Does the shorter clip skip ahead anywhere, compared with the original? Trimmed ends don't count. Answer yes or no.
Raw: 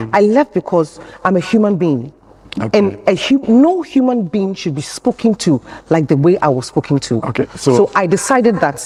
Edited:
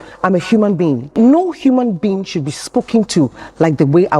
yes